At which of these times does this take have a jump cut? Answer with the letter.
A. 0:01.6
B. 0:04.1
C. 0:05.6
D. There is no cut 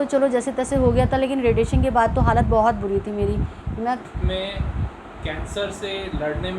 B